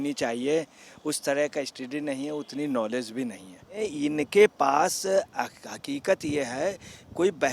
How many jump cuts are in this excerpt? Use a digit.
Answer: 1